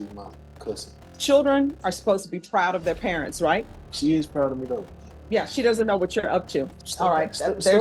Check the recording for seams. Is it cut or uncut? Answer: cut